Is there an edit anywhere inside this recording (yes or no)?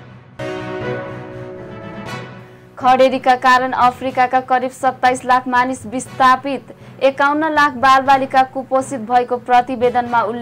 no